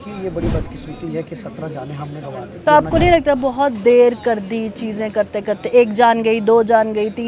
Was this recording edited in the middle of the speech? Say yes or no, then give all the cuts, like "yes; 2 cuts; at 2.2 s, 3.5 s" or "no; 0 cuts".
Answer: yes; 1 cut; at 2.6 s